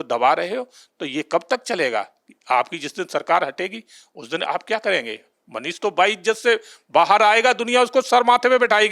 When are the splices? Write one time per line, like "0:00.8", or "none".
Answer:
none